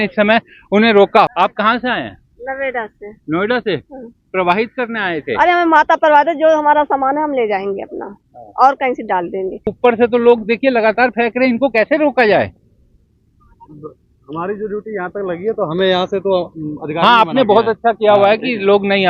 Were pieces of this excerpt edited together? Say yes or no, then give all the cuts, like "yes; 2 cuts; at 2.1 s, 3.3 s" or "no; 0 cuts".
yes; 2 cuts; at 1.3 s, 9.7 s